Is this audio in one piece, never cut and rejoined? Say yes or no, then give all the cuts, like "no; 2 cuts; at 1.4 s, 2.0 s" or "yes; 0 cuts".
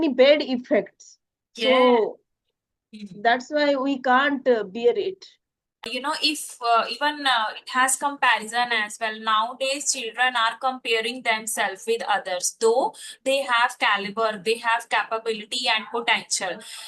no; 1 cut; at 5.9 s